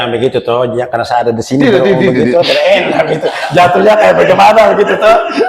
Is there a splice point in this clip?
no; 0 cuts

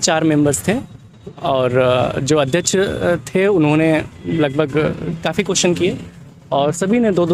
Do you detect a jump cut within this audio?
no; 0 cuts

